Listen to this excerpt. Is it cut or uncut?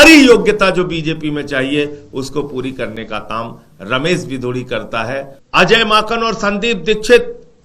cut